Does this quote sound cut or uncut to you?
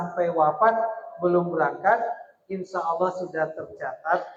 uncut